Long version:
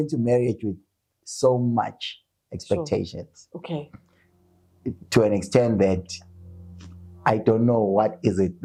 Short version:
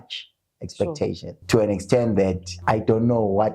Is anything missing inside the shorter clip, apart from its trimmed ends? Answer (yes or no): yes